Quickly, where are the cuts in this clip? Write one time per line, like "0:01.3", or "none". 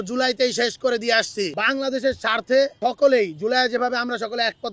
0:01.5